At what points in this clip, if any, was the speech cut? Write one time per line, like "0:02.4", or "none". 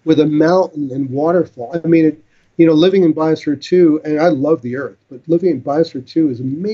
none